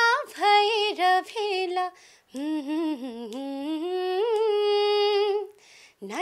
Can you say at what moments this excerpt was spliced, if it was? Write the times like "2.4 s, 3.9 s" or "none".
none